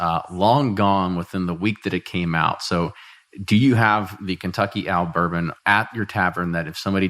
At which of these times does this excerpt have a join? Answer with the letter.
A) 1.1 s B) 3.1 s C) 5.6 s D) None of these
C